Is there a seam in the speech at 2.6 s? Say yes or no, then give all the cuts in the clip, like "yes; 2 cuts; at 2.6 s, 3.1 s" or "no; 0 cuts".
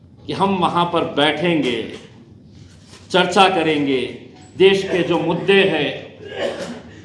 no; 0 cuts